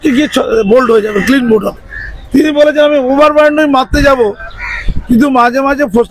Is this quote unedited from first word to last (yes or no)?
yes